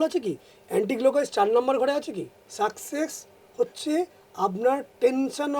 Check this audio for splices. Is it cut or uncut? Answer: cut